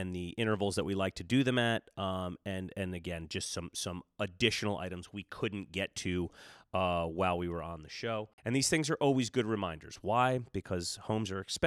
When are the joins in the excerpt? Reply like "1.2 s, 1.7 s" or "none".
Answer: 8.3 s